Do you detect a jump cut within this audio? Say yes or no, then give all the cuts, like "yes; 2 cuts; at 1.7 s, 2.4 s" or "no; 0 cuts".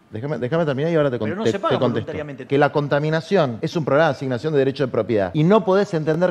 yes; 3 cuts; at 2.4 s, 3.6 s, 5.3 s